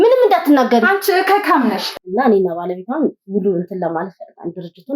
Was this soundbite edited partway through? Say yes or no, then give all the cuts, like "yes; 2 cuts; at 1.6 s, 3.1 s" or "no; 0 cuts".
yes; 1 cut; at 1.8 s